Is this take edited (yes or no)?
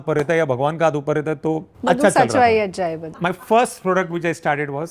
yes